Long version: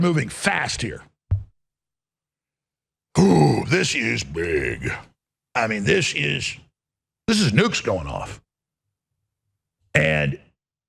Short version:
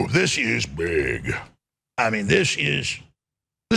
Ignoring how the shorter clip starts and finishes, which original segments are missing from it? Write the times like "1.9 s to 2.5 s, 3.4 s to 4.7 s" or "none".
none